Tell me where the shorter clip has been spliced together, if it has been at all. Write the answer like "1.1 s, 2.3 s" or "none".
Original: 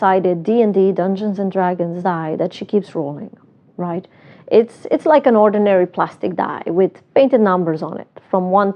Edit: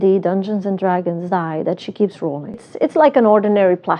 2.7 s